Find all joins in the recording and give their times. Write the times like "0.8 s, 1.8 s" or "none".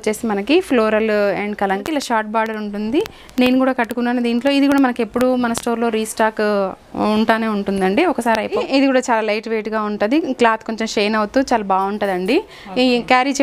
1.8 s, 8.6 s